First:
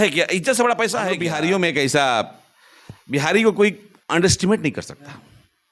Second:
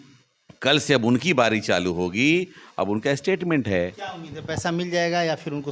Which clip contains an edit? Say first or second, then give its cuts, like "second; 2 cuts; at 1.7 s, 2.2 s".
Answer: first; 1 cut; at 1.1 s